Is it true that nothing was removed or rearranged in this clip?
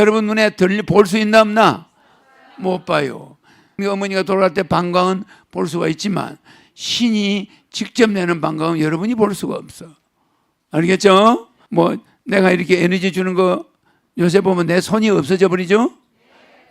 no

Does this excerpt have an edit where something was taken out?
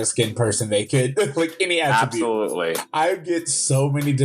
yes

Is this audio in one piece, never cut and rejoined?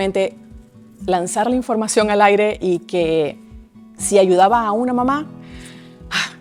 yes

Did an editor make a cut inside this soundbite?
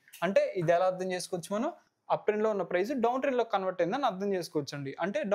yes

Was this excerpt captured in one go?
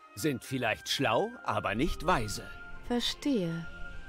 yes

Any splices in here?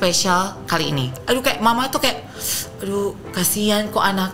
yes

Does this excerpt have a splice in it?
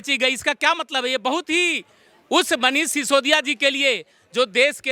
no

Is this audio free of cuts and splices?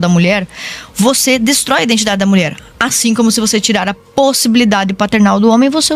yes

